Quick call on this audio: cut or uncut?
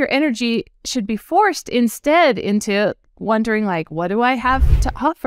uncut